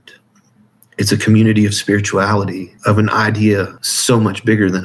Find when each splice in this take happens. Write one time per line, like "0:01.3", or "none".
0:02.7
0:03.8

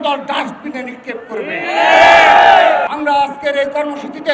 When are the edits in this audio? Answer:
0:02.9

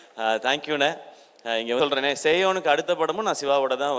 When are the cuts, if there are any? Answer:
0:01.8

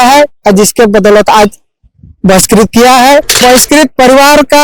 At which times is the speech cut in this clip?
0:03.4

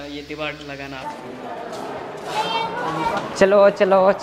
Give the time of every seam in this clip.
0:01.0

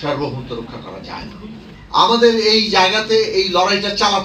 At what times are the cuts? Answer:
0:01.7

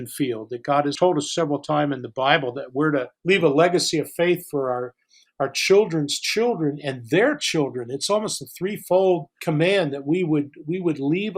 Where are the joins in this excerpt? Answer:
0:00.9
0:03.1
0:09.3

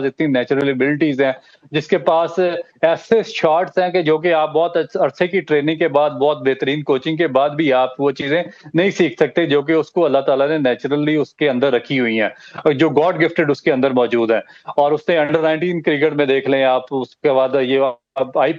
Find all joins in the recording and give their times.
none

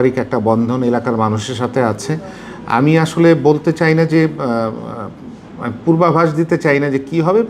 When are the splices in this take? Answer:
none

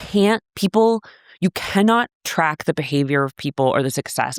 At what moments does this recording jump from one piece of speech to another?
none

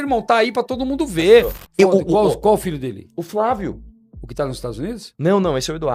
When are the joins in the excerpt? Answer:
0:01.6

